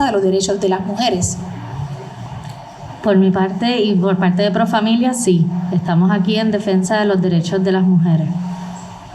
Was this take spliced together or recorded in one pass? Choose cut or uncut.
cut